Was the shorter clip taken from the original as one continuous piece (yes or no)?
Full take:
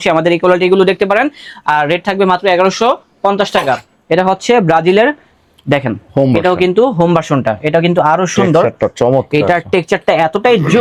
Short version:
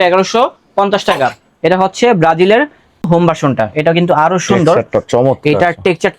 no